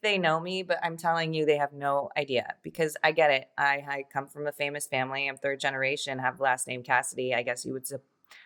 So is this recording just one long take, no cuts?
yes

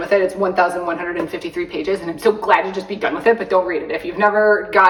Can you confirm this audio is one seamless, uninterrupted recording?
yes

